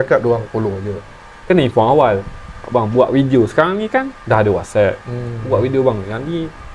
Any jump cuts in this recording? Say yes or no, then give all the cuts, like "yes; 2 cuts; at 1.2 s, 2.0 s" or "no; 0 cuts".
yes; 1 cut; at 1.2 s